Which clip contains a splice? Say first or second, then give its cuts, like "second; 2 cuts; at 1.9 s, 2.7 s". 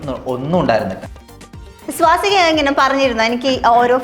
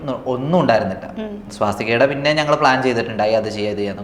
first; 1 cut; at 1.6 s